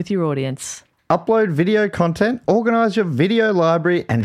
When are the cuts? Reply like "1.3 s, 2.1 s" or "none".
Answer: none